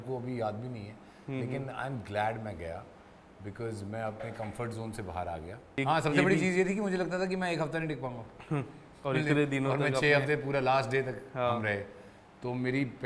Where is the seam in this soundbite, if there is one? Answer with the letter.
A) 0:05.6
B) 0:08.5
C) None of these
A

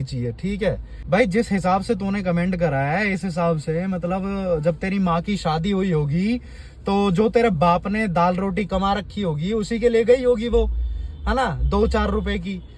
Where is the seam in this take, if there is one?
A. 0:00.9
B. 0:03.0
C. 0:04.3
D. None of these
A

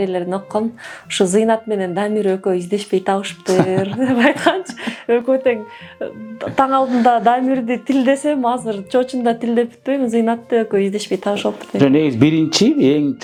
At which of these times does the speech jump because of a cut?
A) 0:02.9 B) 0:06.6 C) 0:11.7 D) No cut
D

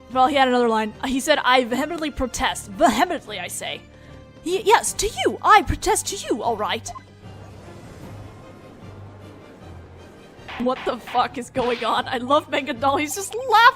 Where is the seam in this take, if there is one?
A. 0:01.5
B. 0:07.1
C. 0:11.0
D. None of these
C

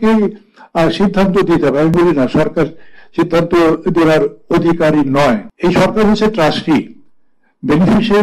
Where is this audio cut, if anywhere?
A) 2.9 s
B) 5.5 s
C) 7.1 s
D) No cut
B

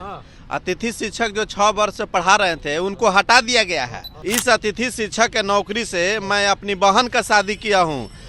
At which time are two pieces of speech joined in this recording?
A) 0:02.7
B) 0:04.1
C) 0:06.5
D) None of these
B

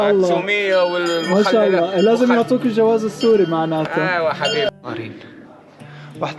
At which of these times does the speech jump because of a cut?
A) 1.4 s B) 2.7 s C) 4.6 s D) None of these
C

